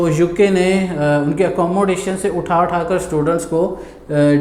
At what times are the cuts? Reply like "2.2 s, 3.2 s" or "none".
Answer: none

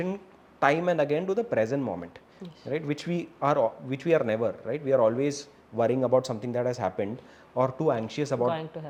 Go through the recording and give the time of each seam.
none

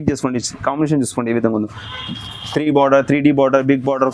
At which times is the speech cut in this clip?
none

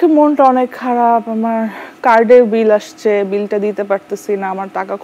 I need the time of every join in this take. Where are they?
none

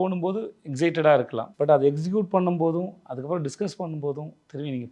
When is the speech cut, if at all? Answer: 1.4 s

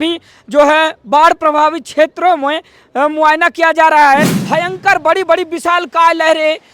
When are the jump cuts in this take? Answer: 4.3 s

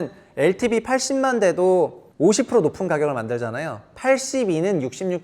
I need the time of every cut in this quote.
2.0 s

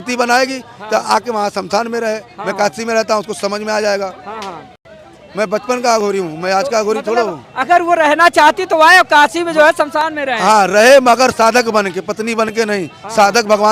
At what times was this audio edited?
none

